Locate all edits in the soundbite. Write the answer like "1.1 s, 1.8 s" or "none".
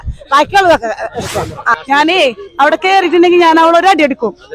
1.8 s